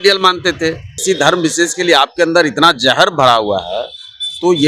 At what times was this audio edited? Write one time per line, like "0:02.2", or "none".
0:00.9